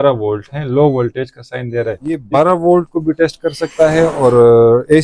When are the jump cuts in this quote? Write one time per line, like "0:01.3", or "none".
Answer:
0:02.2